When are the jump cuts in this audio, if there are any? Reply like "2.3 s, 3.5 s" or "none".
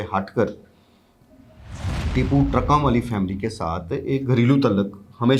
none